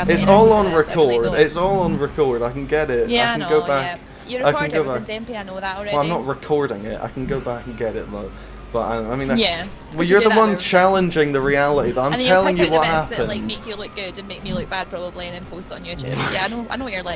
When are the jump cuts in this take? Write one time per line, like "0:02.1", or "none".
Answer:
none